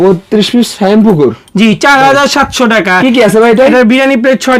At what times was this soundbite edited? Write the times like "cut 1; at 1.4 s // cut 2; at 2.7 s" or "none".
none